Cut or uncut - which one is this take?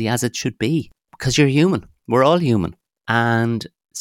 uncut